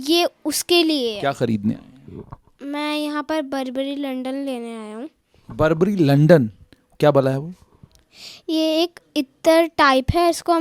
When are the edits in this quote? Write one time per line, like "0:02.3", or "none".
0:01.2